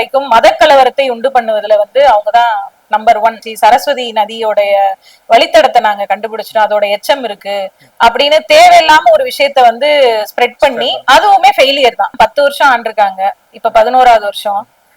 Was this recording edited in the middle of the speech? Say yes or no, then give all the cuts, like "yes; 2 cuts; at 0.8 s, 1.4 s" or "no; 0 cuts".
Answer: yes; 2 cuts; at 3.5 s, 12.1 s